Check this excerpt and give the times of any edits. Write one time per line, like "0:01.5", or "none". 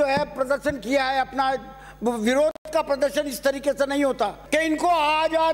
0:04.4